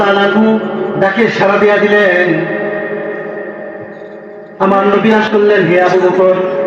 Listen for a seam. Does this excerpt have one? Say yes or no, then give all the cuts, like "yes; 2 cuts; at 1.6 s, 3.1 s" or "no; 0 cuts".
yes; 1 cut; at 5.2 s